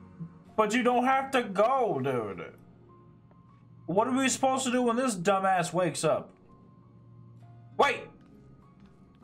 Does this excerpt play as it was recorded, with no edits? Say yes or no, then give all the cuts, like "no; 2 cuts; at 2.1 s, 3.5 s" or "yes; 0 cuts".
yes; 0 cuts